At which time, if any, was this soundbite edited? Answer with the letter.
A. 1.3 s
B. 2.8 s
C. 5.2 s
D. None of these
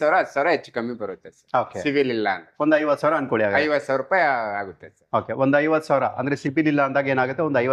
D